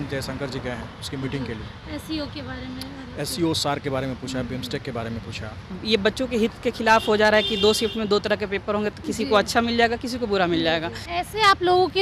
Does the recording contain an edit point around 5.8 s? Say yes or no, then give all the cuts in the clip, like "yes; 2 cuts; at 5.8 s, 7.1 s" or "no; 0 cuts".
yes; 2 cuts; at 5.8 s, 11.0 s